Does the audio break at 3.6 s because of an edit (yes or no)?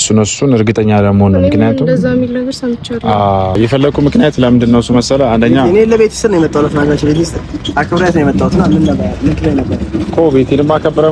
yes